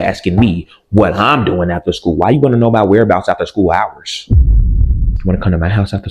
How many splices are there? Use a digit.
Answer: 1